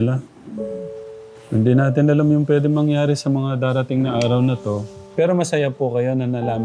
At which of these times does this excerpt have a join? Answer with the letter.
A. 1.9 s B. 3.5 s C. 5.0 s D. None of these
C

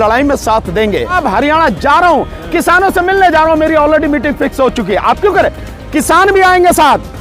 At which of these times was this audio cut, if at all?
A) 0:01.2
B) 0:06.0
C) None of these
A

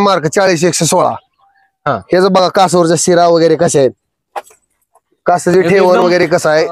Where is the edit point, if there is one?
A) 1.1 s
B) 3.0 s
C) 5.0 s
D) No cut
D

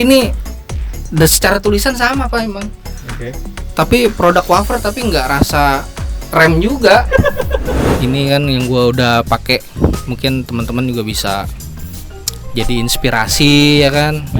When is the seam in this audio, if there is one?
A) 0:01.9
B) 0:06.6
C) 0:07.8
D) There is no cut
C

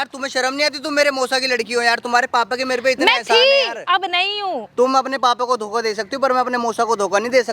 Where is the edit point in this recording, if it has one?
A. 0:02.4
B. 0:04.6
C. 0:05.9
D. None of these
B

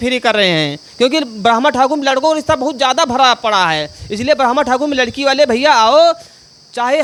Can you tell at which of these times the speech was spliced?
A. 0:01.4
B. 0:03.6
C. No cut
C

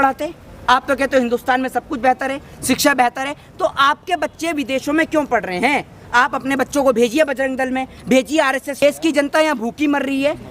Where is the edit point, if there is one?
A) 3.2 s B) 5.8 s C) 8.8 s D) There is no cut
C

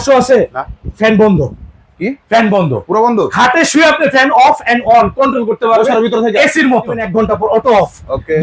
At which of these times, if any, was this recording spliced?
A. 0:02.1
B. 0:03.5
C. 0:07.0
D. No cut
C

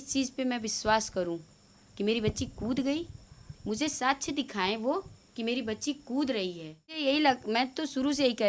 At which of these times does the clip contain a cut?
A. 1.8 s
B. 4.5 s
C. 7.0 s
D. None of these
C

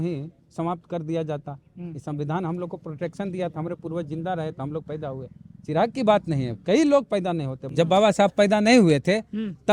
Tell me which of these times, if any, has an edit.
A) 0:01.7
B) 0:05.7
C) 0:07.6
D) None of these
C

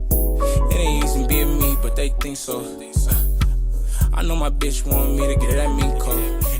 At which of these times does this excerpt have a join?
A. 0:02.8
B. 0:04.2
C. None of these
C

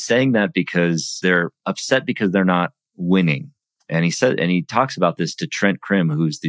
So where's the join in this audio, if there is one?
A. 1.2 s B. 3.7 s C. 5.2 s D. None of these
A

